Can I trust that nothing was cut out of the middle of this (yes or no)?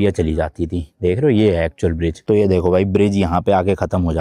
no